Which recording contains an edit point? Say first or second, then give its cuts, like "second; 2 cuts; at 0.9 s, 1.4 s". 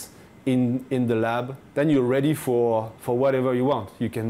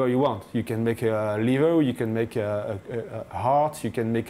first; 1 cut; at 1.6 s